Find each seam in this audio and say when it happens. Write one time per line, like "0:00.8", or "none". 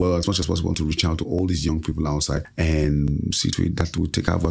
0:02.5